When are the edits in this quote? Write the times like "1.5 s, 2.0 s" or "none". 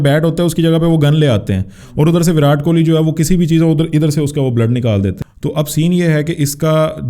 5.2 s